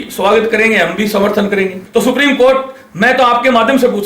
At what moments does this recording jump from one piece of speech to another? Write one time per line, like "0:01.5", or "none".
0:01.8